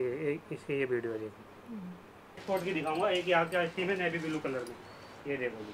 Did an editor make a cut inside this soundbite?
yes; 1 cut; at 2.4 s

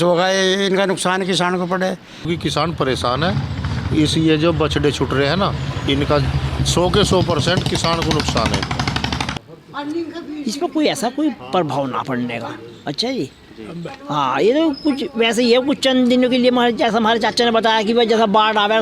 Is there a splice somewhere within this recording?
yes; 2 cuts; at 2.3 s, 9.3 s

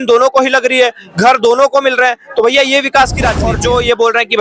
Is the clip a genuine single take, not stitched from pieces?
no; 1 cut; at 3.4 s

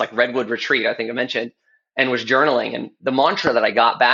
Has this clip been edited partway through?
no; 0 cuts

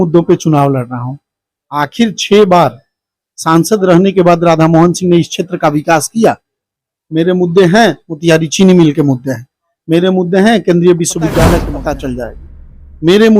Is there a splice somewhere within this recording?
yes; 1 cut; at 11.6 s

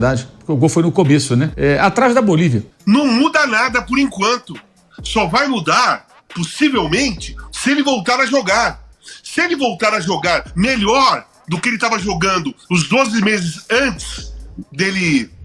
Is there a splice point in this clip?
yes; 2 cuts; at 1.5 s, 2.7 s

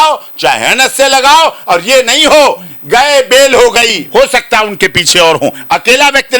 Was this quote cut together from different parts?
yes; 1 cut; at 4.0 s

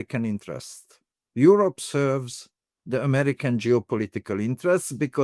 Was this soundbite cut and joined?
no; 0 cuts

